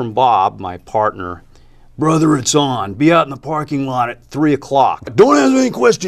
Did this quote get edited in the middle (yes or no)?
yes